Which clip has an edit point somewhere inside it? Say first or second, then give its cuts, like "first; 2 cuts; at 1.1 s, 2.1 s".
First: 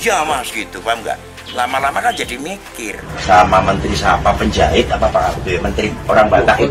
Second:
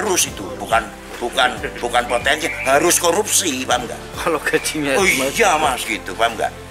first; 1 cut; at 3.1 s